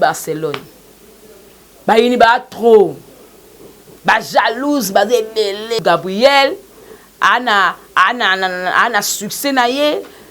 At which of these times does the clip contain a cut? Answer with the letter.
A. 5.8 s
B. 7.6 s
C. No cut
A